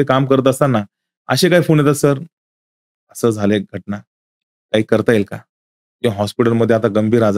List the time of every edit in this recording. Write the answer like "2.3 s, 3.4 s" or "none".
none